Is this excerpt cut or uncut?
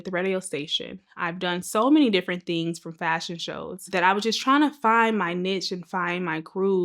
cut